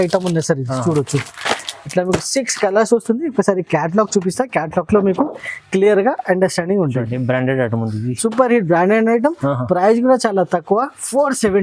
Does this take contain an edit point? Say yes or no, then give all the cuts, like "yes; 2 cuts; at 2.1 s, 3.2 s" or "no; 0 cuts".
no; 0 cuts